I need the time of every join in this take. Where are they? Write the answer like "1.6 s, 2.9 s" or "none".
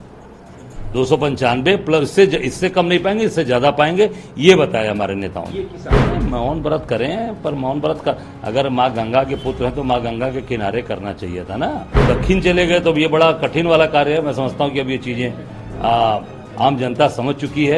5.8 s, 11.9 s